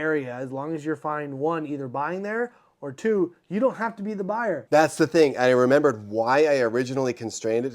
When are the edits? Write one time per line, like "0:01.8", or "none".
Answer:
0:04.6